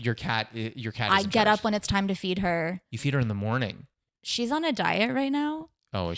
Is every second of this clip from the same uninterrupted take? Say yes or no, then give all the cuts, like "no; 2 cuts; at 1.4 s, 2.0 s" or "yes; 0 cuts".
no; 1 cut; at 2.9 s